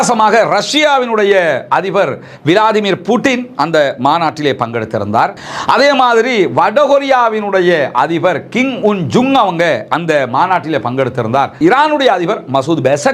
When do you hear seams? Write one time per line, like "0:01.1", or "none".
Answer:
0:05.5
0:11.6